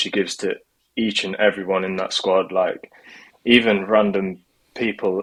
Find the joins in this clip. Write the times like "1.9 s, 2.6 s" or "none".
none